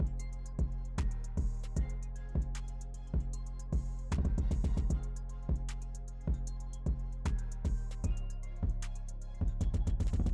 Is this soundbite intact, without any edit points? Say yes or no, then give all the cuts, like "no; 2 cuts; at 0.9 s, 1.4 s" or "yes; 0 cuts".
yes; 0 cuts